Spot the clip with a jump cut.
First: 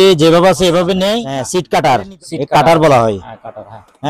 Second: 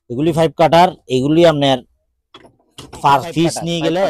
first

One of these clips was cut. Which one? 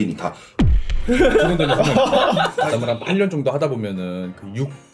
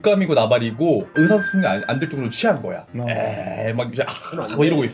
first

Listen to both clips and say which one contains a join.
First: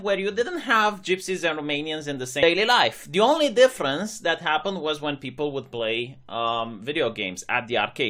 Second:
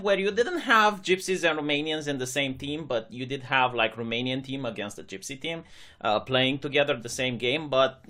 second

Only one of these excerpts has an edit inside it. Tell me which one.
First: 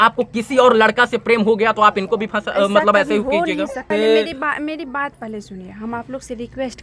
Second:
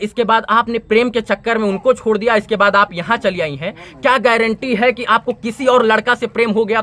first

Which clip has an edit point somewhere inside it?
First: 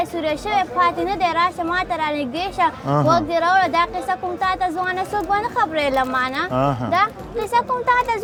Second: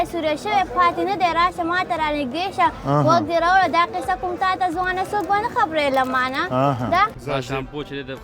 second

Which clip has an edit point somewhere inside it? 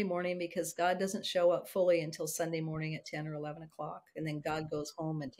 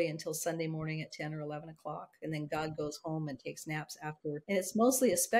second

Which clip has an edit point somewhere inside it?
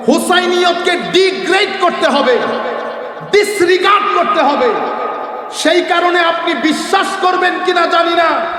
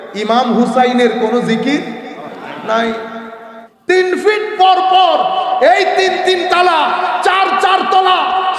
second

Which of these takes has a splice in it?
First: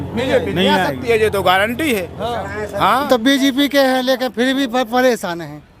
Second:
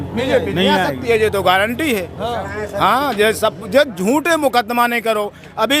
first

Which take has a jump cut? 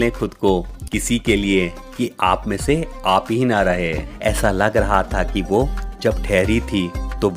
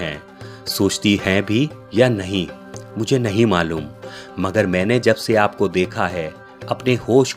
first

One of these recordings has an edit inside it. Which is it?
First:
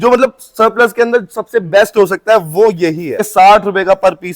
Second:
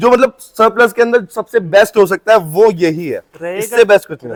first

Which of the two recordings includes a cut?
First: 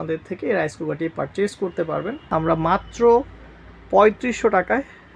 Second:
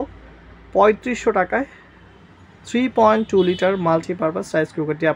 first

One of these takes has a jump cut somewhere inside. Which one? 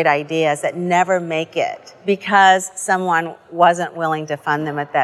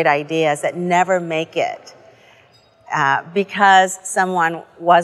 first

